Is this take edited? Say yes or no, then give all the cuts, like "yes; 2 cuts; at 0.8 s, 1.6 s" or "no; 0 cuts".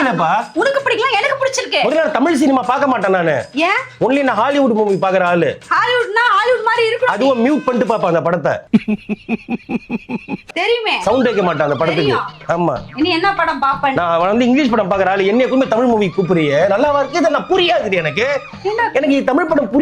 no; 0 cuts